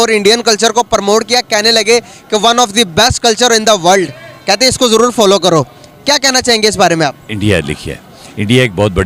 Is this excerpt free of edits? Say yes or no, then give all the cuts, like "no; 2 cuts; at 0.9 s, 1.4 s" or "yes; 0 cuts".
yes; 0 cuts